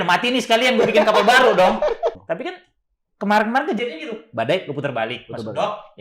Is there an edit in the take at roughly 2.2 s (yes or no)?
yes